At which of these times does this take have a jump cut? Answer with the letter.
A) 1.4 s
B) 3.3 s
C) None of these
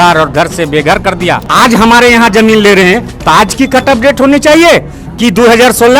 A